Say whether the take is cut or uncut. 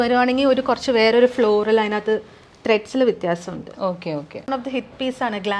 cut